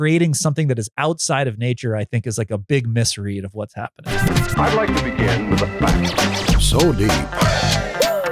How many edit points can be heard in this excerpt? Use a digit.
1